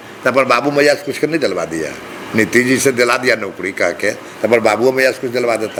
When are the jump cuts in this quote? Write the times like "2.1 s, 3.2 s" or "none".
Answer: none